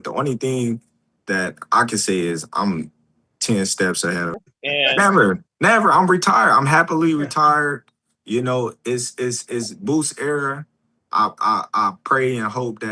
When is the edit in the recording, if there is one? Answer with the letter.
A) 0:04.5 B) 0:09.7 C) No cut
A